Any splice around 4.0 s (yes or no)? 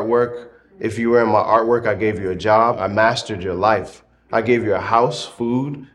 no